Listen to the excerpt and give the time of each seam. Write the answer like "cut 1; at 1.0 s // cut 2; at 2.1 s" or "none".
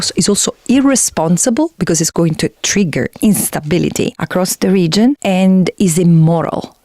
cut 1; at 4.2 s // cut 2; at 5.2 s